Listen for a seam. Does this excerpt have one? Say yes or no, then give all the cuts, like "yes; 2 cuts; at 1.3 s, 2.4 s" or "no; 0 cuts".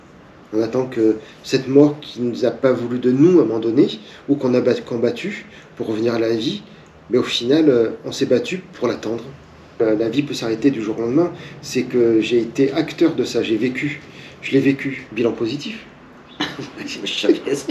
yes; 2 cuts; at 9.8 s, 15.0 s